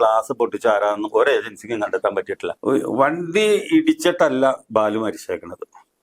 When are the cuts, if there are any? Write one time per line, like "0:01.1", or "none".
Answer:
0:02.4